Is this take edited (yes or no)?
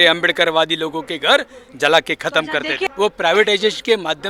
yes